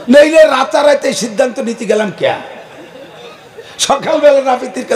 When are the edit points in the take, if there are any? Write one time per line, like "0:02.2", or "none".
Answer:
none